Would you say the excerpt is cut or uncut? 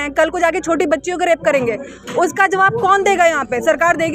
uncut